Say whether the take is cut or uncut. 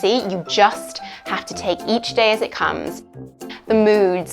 cut